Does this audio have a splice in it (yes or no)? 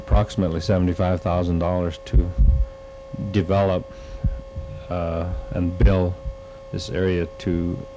yes